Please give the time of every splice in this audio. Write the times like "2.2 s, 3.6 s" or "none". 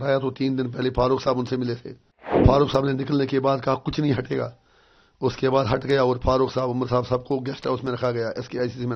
2.4 s